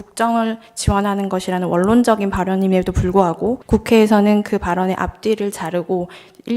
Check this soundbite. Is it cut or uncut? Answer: cut